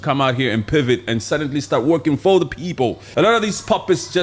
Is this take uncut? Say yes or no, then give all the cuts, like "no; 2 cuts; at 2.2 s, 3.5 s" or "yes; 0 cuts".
no; 1 cut; at 3.0 s